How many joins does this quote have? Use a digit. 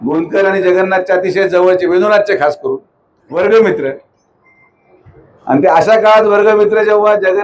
1